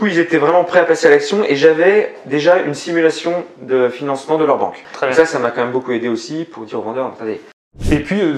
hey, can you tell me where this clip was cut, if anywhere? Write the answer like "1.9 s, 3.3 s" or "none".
4.8 s, 7.7 s